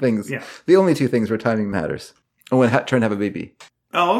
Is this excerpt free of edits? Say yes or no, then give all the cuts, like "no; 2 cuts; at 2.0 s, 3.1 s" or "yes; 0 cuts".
no; 1 cut; at 1.7 s